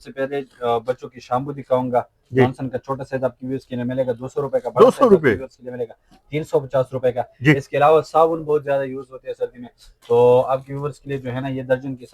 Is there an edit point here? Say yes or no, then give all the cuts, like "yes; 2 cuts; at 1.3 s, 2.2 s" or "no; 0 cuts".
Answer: no; 0 cuts